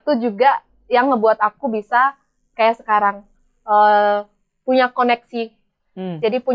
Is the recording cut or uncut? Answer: uncut